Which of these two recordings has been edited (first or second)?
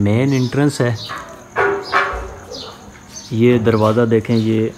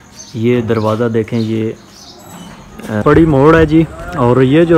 second